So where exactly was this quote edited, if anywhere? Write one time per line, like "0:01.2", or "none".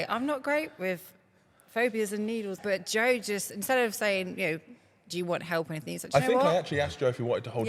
0:02.6